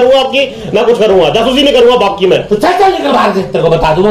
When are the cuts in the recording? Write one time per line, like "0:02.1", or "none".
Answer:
none